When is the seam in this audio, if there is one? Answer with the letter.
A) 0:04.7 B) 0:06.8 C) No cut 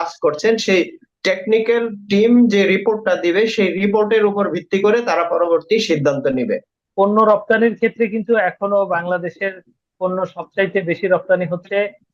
B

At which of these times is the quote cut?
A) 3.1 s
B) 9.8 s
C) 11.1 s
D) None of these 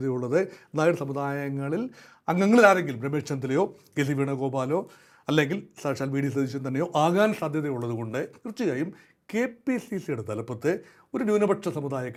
D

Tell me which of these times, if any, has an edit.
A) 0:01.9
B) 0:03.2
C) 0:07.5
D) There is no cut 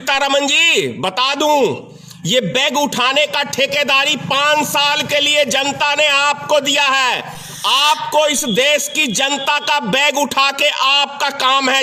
D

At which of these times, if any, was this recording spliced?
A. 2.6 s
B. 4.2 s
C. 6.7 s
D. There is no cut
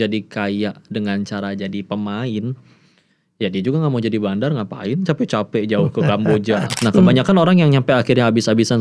C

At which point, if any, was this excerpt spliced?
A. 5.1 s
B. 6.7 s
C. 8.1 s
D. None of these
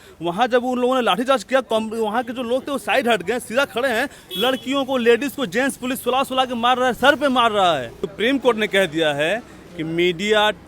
C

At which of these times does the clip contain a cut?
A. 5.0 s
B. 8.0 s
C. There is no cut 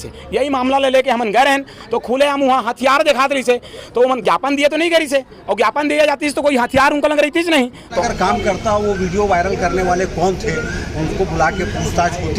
B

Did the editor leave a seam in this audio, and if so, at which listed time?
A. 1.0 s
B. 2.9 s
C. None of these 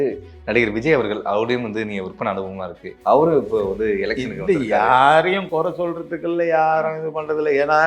B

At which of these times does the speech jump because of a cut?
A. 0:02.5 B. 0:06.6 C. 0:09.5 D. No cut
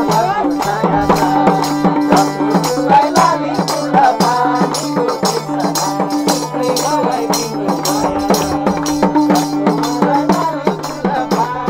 D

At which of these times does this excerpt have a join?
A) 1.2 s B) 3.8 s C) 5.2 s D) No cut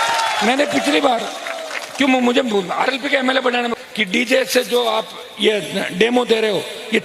B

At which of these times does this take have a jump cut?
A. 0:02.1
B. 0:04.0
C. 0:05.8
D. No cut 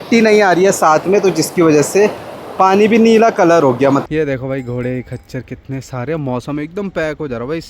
B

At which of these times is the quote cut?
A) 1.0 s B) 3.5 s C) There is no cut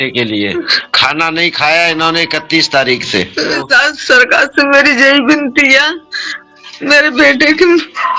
B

